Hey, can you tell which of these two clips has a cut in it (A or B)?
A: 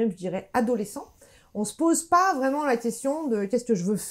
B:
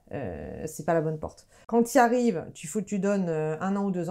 B